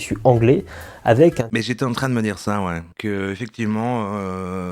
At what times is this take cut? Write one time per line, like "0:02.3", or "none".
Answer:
0:01.3